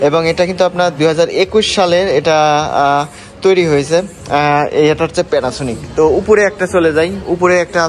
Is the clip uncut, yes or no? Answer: yes